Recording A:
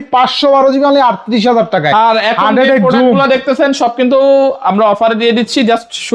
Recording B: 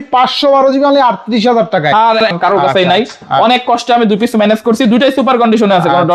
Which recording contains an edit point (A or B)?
B